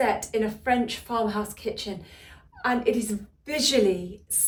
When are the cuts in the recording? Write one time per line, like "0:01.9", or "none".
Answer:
none